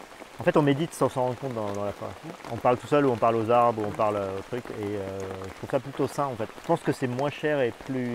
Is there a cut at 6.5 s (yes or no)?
no